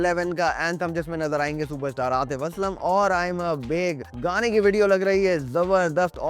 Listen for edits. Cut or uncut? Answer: uncut